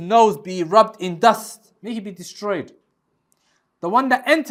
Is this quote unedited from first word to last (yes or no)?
yes